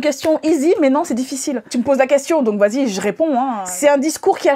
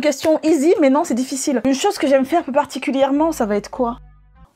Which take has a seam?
first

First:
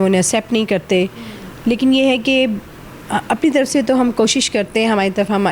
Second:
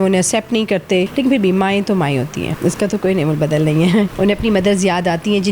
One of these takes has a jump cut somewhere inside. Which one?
second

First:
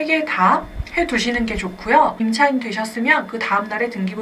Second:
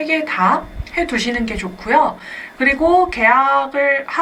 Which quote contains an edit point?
first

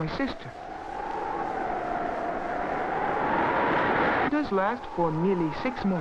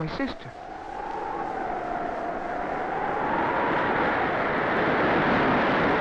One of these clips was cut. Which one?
second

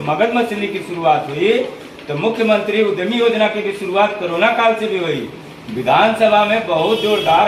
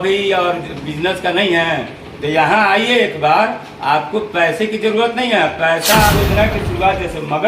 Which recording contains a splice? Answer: second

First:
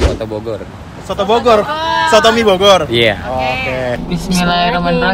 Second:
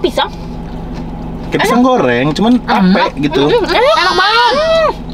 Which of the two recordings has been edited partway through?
first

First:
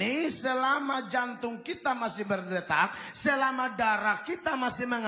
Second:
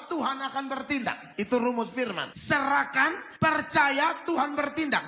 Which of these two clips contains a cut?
second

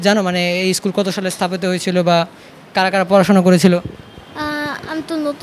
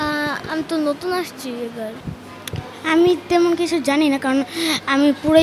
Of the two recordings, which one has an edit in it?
second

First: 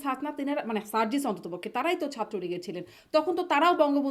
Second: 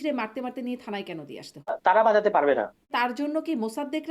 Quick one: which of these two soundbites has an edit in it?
second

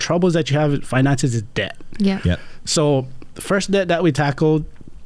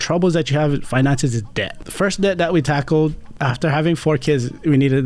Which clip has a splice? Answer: second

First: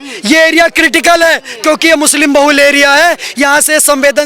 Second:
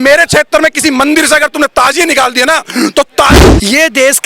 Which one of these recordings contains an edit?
second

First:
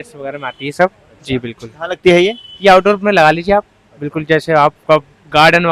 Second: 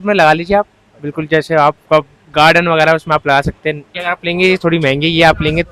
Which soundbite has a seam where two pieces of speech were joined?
second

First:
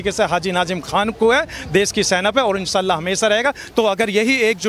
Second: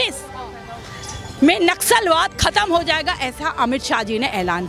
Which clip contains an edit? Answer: first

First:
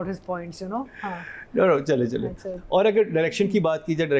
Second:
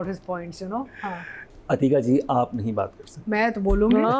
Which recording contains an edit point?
second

